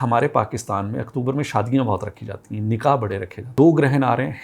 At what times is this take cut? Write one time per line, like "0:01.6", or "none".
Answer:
0:03.5